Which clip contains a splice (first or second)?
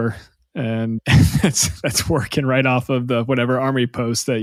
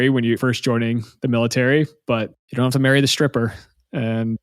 second